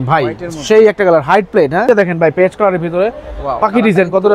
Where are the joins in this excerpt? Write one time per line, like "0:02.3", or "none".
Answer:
0:01.8